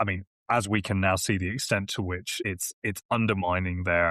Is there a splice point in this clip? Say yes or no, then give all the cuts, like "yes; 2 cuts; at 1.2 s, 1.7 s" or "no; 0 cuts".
yes; 1 cut; at 2.5 s